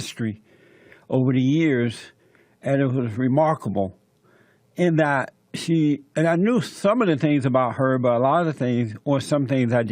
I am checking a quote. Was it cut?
yes; 1 cut; at 1.3 s

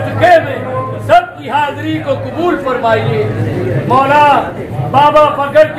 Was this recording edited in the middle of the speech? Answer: no; 0 cuts

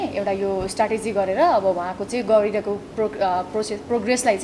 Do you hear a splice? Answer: no; 0 cuts

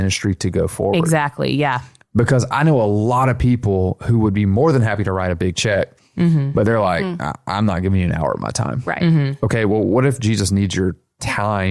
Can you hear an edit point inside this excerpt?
no; 0 cuts

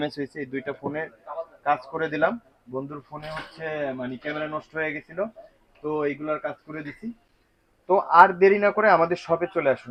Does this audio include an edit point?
no; 0 cuts

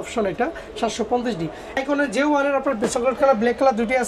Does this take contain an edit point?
yes; 1 cut; at 1.8 s

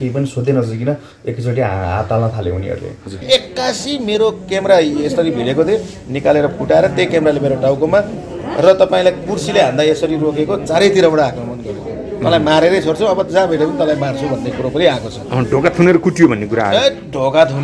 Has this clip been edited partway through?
yes; 1 cut; at 3.2 s

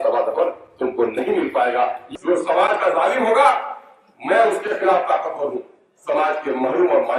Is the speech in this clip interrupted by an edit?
yes; 1 cut; at 2.0 s

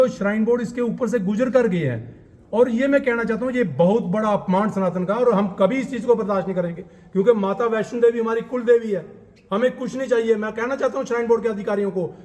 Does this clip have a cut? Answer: no; 0 cuts

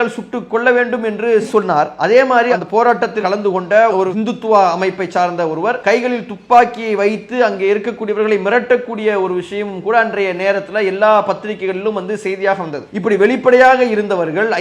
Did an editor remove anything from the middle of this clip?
yes; 2 cuts; at 3.2 s, 5.8 s

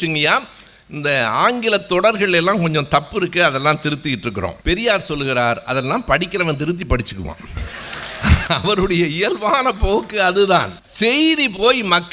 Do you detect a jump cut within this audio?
yes; 2 cuts; at 4.6 s, 10.8 s

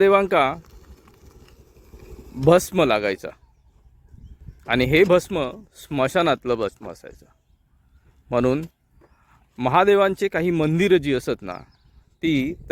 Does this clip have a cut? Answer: no; 0 cuts

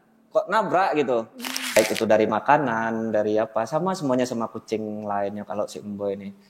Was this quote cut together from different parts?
yes; 1 cut; at 1.8 s

